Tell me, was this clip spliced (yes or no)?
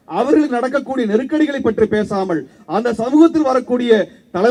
no